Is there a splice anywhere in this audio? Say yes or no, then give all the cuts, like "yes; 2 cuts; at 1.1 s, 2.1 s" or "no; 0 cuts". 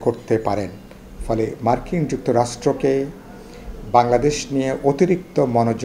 no; 0 cuts